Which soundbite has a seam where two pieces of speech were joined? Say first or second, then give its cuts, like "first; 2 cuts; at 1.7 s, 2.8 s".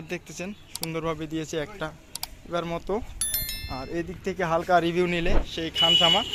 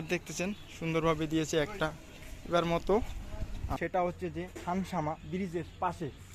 second; 1 cut; at 3.8 s